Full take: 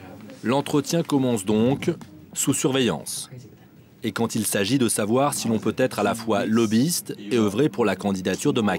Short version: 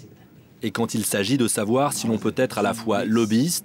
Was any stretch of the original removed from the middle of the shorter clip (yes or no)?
no